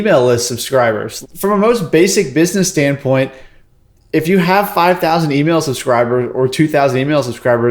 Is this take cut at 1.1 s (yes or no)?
yes